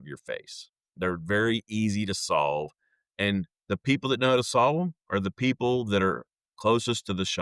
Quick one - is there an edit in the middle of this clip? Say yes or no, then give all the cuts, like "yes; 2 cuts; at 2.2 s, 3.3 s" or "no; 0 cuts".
no; 0 cuts